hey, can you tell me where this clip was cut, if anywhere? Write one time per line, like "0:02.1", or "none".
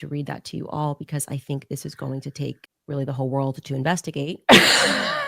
0:02.7